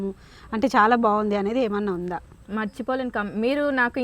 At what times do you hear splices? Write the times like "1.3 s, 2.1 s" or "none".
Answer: 2.3 s